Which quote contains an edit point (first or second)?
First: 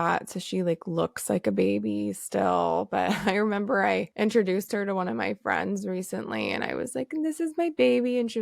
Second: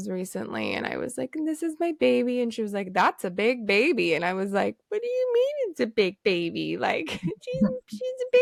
first